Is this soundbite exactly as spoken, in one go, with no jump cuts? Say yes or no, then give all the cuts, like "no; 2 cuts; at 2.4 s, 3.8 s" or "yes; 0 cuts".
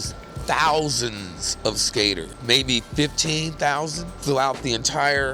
no; 2 cuts; at 2.3 s, 4.2 s